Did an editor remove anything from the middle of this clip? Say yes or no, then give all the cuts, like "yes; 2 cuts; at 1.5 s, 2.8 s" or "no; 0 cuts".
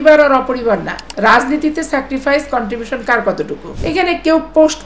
yes; 2 cuts; at 1.0 s, 3.7 s